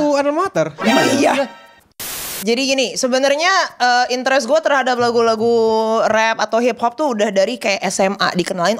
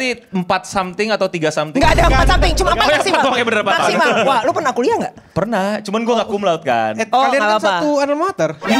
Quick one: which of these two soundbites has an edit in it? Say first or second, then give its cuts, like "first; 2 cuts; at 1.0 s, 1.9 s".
first; 1 cut; at 2.0 s